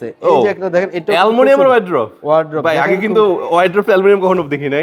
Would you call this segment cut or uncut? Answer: uncut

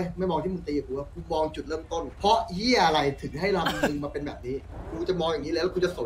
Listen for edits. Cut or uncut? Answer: cut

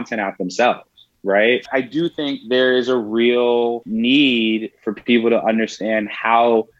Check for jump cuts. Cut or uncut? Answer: cut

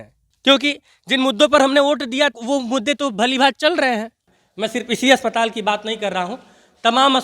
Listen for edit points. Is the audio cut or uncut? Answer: cut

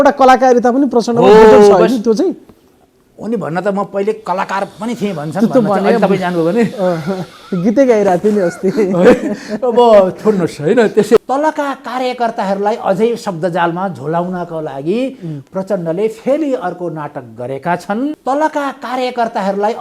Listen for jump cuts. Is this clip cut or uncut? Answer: cut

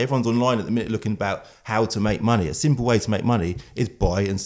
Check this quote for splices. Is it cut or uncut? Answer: uncut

